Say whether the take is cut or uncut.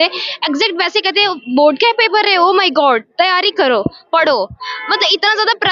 uncut